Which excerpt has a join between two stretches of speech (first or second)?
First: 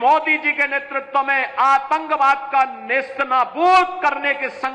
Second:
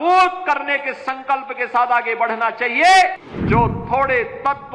second